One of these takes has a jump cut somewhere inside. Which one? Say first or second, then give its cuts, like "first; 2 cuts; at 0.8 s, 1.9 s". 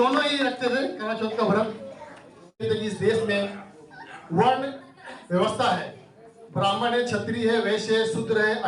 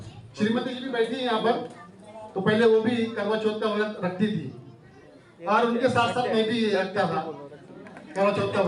first; 1 cut; at 2.6 s